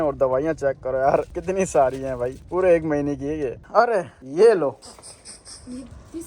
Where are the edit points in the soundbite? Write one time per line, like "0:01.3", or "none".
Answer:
none